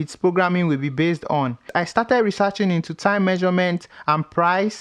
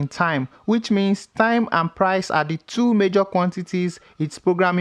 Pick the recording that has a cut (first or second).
first